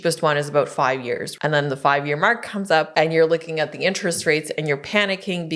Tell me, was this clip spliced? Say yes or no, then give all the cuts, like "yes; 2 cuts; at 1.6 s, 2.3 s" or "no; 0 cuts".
yes; 2 cuts; at 1.3 s, 2.9 s